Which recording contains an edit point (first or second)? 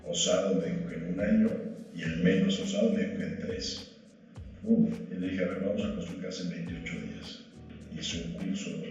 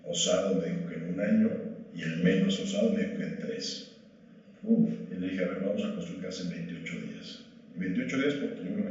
first